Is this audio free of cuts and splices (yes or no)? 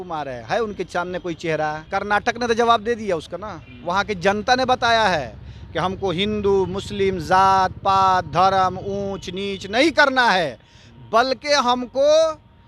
no